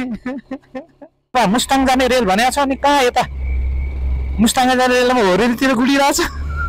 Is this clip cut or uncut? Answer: cut